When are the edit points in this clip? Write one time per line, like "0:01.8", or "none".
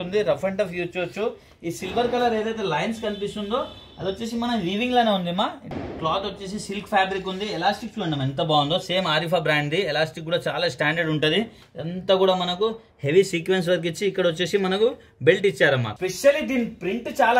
0:05.7
0:11.6
0:15.9